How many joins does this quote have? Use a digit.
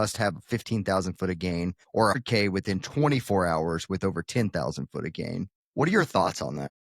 2